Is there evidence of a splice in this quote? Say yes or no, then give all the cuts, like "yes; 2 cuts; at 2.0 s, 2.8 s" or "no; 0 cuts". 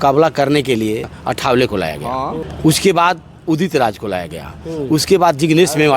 yes; 2 cuts; at 1.1 s, 2.4 s